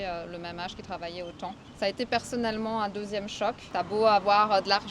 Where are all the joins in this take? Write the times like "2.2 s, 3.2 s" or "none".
1.6 s, 3.6 s